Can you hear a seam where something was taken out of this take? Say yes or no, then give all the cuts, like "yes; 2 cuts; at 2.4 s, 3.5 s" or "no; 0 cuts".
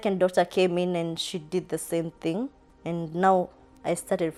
no; 0 cuts